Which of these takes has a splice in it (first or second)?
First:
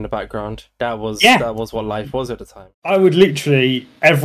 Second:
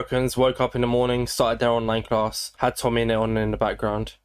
first